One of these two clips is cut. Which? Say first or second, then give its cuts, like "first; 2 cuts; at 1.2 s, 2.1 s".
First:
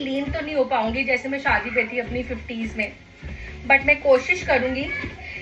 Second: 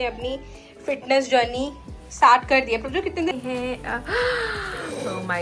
second; 1 cut; at 3.3 s